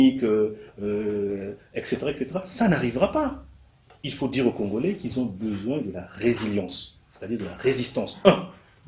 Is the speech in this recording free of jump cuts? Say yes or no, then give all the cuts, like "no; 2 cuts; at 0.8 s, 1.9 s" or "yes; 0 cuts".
yes; 0 cuts